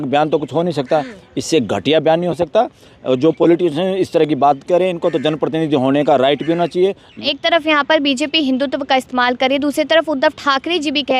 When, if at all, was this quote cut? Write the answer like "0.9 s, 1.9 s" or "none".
7.1 s